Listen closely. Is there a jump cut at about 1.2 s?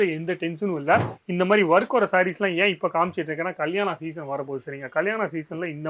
yes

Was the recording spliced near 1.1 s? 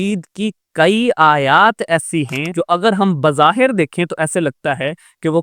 no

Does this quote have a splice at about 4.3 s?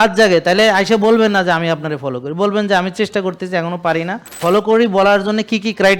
yes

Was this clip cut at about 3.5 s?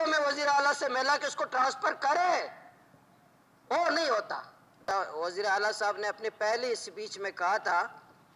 no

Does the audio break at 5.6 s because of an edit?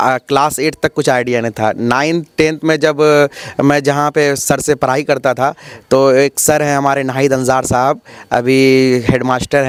no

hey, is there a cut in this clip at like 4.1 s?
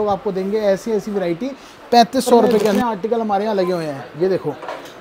no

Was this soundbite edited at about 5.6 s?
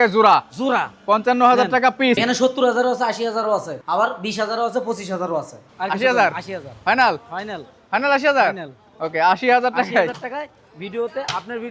yes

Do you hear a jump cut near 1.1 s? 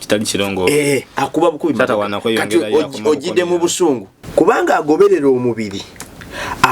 no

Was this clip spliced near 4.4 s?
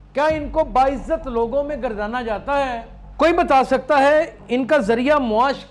no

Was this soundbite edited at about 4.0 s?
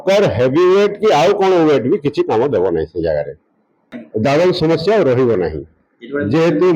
yes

